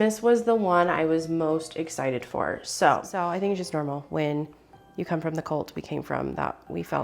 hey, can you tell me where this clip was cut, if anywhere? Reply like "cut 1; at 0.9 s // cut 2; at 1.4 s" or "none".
cut 1; at 3.1 s